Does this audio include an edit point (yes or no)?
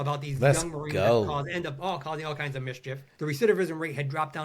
yes